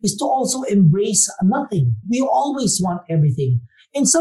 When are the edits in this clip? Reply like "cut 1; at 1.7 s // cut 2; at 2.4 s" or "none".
cut 1; at 2.1 s